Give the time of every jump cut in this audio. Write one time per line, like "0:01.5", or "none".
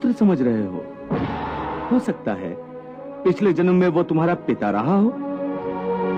0:01.8